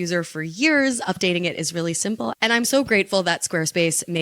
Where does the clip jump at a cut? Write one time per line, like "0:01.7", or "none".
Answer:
0:02.3

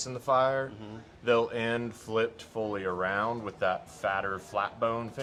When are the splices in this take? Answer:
none

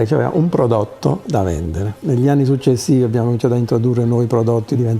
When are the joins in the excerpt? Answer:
0:01.9

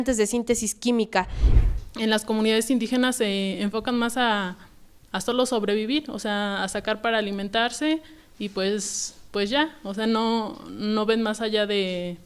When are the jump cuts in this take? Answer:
0:01.4

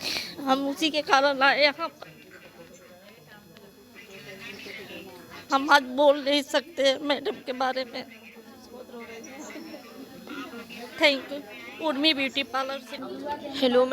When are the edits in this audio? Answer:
0:12.9

